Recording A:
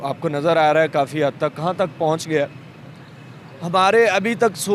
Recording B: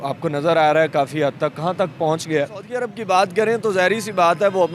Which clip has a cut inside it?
B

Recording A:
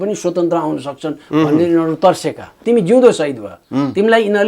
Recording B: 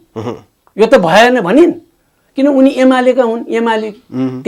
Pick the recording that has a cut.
A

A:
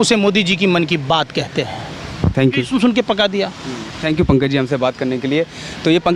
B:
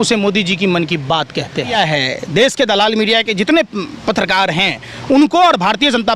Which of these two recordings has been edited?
B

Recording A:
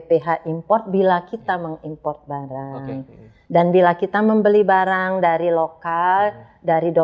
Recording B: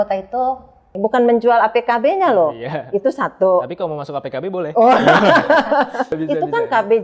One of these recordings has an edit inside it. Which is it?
B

